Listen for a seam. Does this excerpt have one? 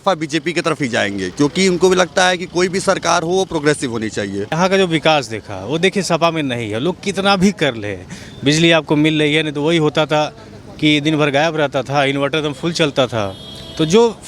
yes; 1 cut; at 4.5 s

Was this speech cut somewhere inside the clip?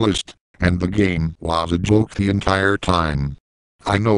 no; 0 cuts

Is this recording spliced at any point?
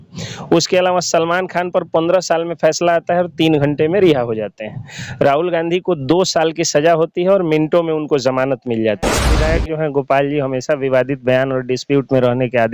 yes; 1 cut; at 9.3 s

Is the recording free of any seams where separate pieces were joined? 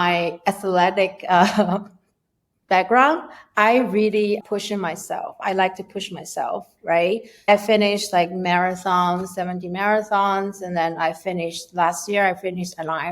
no; 2 cuts; at 4.4 s, 7.5 s

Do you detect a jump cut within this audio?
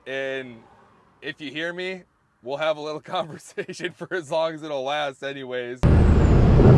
yes; 1 cut; at 5.8 s

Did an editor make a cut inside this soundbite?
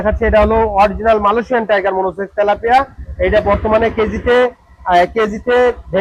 no; 0 cuts

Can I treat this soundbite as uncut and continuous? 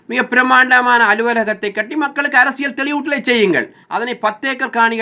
no; 1 cut; at 3.8 s

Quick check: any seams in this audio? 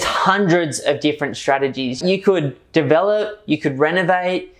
yes; 1 cut; at 2.0 s

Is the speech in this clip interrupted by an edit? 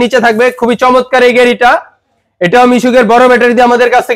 no; 0 cuts

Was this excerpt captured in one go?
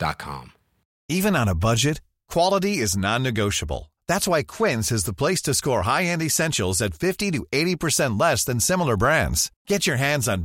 no; 1 cut; at 0.9 s

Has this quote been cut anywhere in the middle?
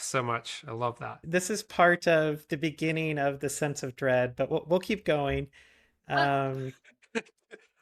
yes; 1 cut; at 1.1 s

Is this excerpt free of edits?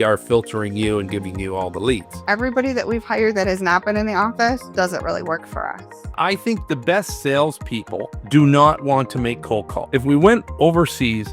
no; 3 cuts; at 2.1 s, 6.1 s, 9.8 s

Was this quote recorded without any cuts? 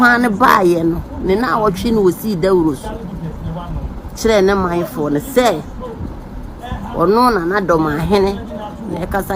yes; 0 cuts

